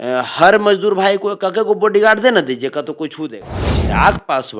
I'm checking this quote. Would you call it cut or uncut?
cut